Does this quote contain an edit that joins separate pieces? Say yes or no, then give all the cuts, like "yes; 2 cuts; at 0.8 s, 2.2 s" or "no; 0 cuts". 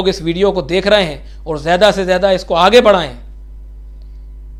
no; 0 cuts